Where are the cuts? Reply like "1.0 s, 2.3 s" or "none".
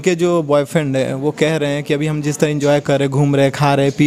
none